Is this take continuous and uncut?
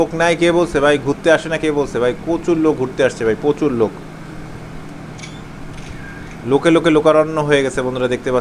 yes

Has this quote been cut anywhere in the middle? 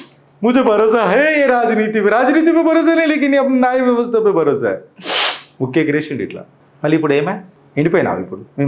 yes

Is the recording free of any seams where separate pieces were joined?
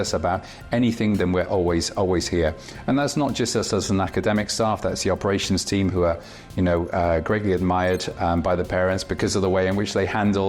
yes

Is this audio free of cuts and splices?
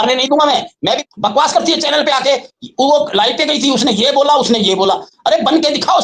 no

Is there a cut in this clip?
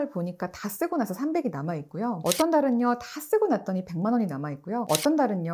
no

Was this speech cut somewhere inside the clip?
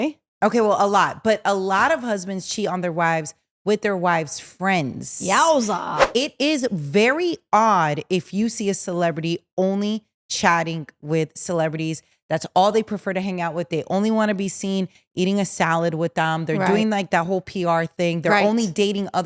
yes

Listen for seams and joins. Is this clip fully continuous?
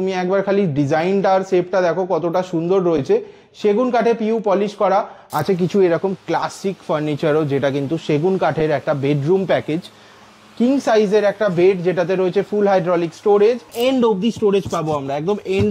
no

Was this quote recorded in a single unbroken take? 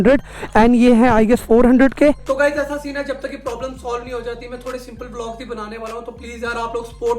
no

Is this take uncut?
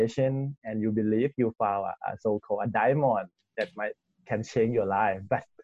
yes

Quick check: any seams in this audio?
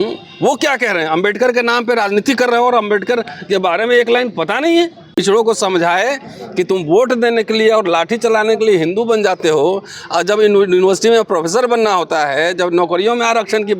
yes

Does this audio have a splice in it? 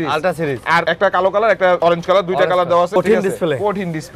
yes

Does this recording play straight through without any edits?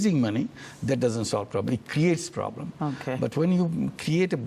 yes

